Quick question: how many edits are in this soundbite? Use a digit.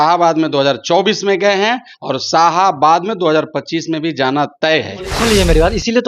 1